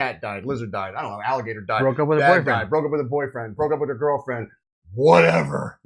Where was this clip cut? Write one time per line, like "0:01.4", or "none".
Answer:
none